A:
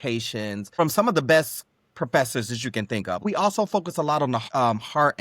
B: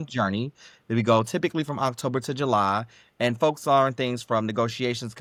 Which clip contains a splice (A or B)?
A